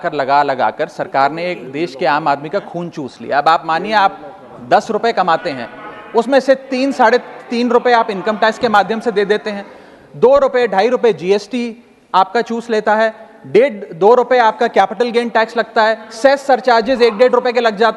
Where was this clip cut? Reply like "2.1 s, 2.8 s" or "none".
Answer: none